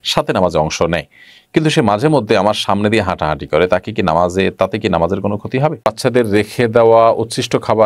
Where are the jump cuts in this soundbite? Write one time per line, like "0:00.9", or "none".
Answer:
0:05.9